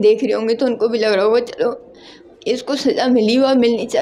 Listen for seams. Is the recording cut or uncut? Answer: uncut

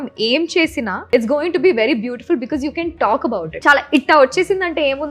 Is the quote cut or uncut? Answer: cut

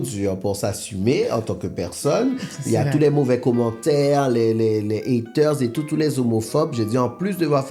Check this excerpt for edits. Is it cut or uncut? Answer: uncut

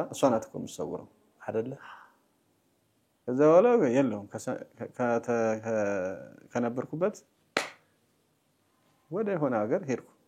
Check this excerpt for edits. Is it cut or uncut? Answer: uncut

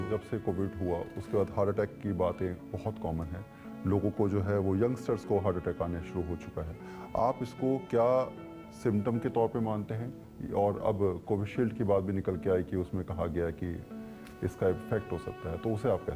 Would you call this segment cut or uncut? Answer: uncut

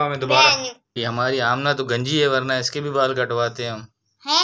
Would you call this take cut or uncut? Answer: cut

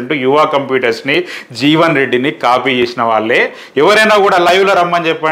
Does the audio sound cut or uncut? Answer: uncut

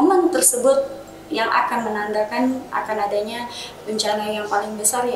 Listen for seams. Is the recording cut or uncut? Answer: uncut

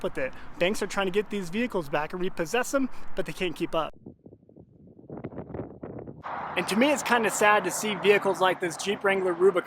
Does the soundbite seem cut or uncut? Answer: uncut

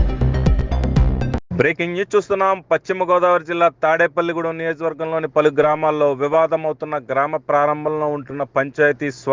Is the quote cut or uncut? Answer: cut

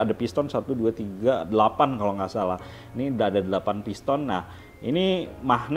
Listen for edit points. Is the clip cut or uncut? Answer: uncut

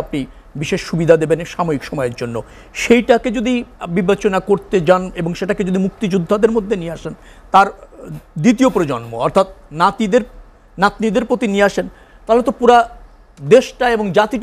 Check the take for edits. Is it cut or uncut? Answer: uncut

